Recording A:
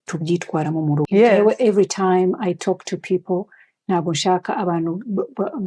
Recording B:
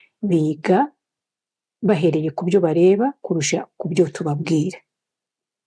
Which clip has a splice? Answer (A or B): A